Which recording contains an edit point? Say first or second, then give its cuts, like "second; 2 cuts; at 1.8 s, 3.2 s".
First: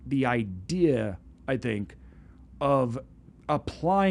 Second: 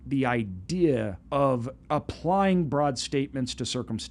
second; 2 cuts; at 1.2 s, 1.7 s